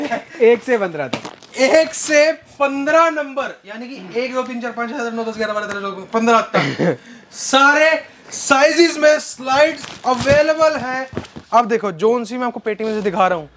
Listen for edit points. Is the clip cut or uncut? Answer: cut